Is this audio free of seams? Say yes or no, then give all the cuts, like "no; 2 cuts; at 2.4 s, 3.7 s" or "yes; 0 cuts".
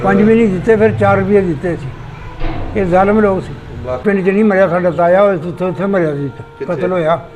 no; 1 cut; at 4.0 s